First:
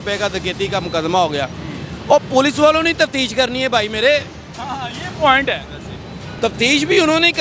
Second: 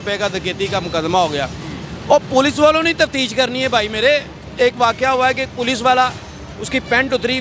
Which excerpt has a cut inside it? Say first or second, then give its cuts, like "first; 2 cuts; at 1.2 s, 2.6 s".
second; 1 cut; at 4.5 s